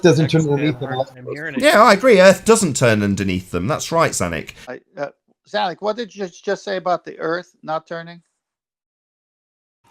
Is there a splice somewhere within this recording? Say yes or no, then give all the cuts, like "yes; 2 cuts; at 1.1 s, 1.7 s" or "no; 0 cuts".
yes; 1 cut; at 4.6 s